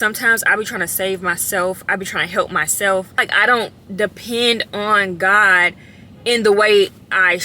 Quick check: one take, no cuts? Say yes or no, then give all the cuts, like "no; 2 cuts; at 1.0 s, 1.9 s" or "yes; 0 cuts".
no; 1 cut; at 3.3 s